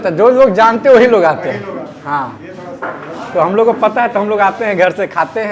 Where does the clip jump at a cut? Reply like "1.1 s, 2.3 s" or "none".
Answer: none